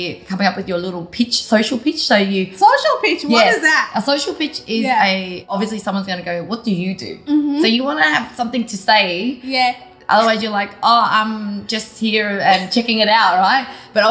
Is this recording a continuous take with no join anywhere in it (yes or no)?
no